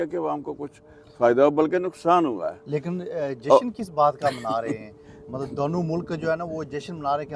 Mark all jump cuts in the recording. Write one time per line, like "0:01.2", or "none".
none